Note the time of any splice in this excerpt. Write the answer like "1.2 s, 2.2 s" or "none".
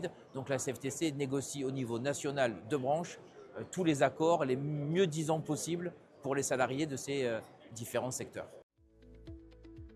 8.9 s